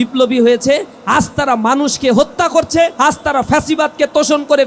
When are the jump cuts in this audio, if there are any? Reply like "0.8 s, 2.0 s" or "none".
2.9 s